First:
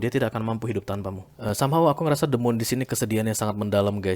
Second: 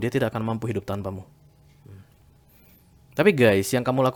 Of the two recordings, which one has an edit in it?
first; 1 cut; at 1.3 s

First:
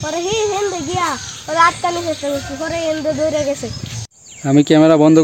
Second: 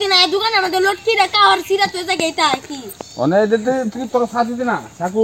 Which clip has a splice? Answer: first; 1 cut; at 3.9 s

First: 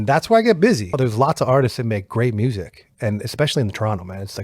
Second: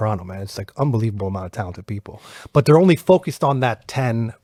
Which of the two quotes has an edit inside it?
first; 1 cut; at 1.0 s

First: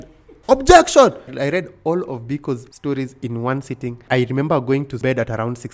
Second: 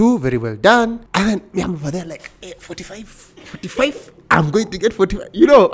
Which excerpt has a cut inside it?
first; 4 cuts; at 1.3 s, 2.7 s, 4.0 s, 5.0 s

